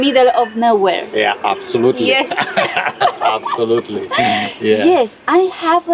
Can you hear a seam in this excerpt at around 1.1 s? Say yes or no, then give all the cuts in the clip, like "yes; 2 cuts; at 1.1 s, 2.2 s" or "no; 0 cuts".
no; 0 cuts